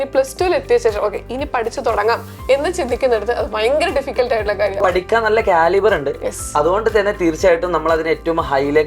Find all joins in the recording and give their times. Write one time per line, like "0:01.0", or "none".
0:04.8